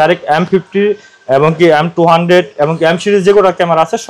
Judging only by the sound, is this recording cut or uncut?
uncut